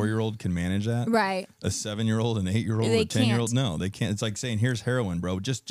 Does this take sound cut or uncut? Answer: uncut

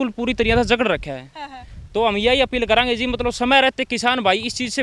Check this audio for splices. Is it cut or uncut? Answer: uncut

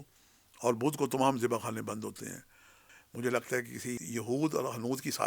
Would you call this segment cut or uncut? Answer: cut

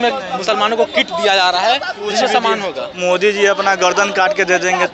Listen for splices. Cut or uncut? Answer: uncut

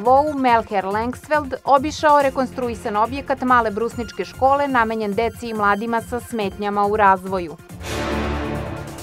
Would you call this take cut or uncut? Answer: uncut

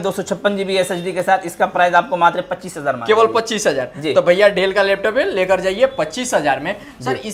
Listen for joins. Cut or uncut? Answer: uncut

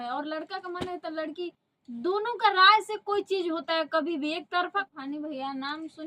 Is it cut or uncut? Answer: cut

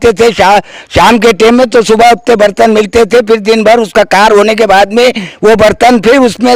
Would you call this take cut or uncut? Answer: uncut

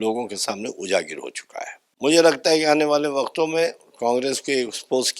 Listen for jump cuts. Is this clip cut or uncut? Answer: cut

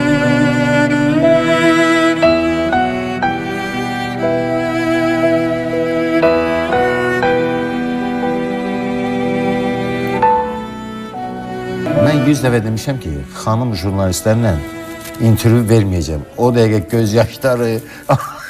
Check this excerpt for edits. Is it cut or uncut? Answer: cut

